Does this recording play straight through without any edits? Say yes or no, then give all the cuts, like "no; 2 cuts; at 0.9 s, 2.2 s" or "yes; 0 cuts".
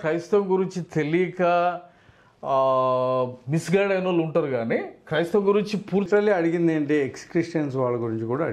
no; 1 cut; at 6.1 s